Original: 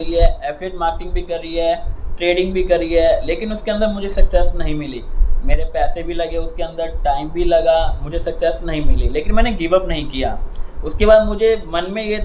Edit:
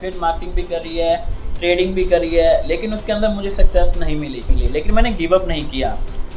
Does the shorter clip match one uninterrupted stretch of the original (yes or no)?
no